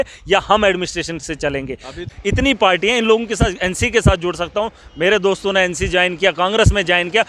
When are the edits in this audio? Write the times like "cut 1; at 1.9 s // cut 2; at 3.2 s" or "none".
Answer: cut 1; at 2.0 s

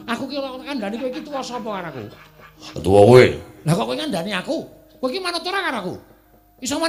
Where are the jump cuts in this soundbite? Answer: none

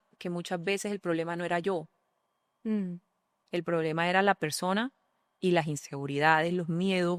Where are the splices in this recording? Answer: none

